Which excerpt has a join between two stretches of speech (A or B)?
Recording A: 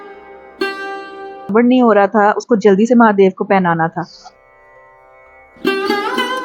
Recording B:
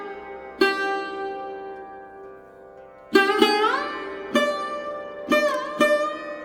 A